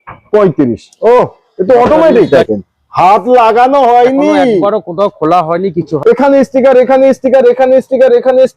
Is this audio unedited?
no; 2 cuts; at 2.3 s, 5.9 s

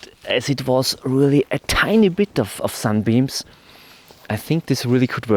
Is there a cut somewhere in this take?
no; 0 cuts

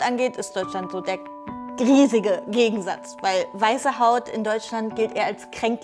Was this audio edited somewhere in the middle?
no; 0 cuts

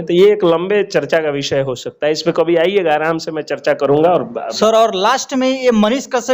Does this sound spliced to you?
no; 0 cuts

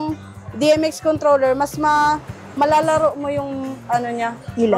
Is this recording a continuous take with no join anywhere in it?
yes; 0 cuts

